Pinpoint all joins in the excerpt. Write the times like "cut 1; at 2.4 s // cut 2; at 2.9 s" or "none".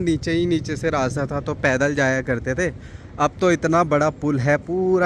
none